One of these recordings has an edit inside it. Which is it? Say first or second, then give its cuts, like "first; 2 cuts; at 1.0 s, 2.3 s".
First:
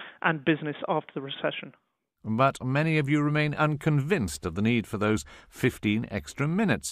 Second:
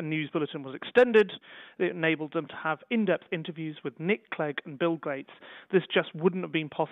first; 1 cut; at 5.0 s